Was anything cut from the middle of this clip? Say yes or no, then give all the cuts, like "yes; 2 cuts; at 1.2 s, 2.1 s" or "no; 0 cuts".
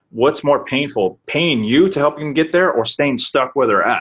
yes; 1 cut; at 1.2 s